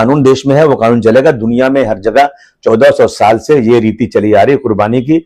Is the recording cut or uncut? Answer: uncut